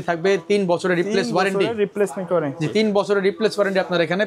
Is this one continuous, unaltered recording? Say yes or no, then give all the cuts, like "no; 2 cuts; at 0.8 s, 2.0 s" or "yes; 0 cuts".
yes; 0 cuts